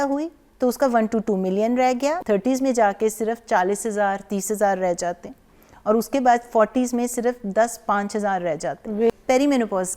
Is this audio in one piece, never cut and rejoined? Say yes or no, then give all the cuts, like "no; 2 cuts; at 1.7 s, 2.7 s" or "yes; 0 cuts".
no; 2 cuts; at 2.2 s, 9.1 s